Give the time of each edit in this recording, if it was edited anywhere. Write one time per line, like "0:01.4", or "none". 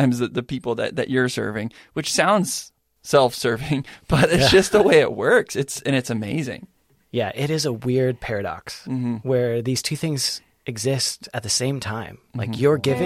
none

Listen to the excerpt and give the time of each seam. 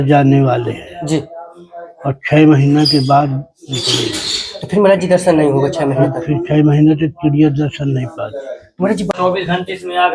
0:09.1

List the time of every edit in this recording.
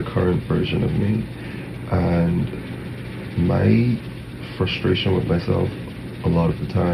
none

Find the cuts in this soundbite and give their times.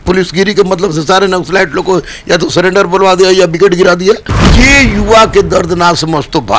0:04.4

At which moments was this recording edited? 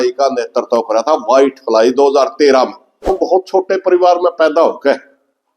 0:03.1

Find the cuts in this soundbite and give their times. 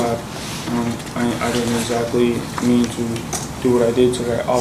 none

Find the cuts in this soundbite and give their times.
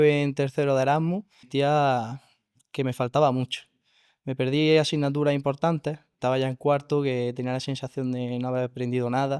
0:01.5
0:06.1

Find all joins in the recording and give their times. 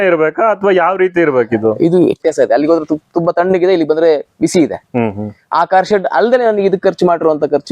0:02.2

